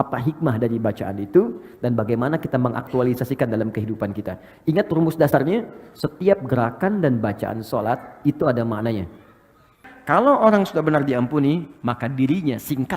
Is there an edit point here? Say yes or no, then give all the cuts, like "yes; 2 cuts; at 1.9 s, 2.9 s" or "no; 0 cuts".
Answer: yes; 1 cut; at 9.9 s